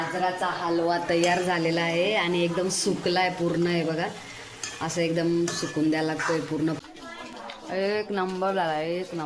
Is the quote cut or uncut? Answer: cut